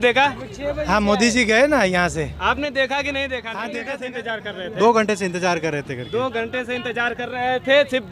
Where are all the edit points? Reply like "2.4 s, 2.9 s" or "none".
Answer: 3.7 s